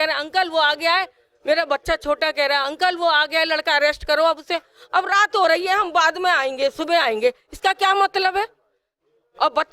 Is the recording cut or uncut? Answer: uncut